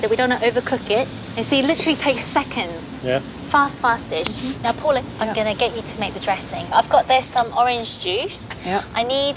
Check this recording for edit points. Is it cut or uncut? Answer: uncut